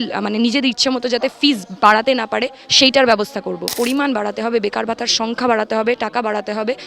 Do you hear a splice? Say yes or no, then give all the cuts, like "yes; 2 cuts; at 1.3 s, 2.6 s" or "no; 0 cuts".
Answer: yes; 1 cut; at 3.7 s